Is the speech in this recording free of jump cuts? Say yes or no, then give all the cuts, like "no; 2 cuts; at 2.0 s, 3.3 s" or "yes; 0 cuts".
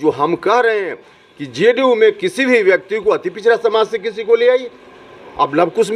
yes; 0 cuts